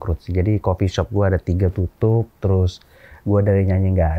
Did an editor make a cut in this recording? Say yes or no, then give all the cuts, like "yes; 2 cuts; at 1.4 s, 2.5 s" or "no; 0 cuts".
no; 0 cuts